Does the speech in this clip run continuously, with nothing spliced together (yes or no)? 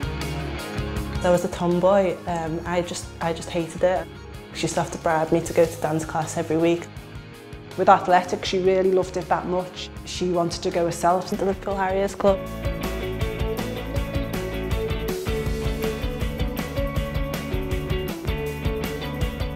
yes